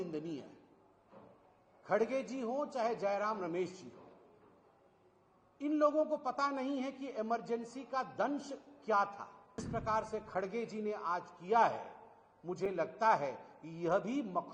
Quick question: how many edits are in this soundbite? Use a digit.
1